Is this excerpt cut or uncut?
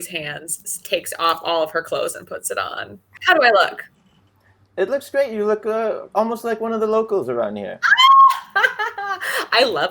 cut